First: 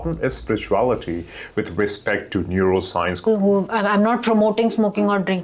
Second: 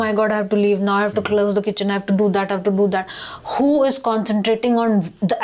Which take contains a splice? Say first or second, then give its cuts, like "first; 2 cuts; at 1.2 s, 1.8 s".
first; 1 cut; at 3.3 s